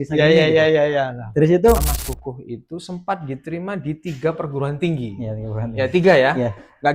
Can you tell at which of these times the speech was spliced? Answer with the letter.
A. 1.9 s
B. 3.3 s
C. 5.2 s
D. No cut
A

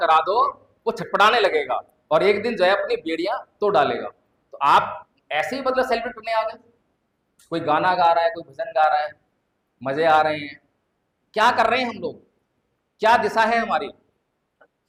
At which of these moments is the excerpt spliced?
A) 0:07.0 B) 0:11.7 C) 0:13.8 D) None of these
D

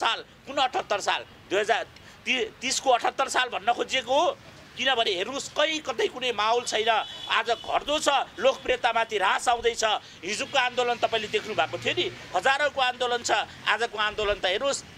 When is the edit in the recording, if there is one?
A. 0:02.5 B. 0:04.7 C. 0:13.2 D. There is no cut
D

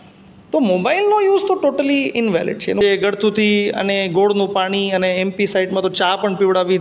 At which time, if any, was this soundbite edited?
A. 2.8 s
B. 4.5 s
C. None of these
A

